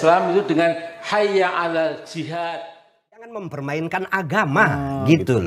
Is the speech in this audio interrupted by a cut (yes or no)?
yes